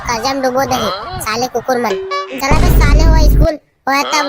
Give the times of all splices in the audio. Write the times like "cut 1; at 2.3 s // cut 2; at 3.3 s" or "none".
cut 1; at 2.3 s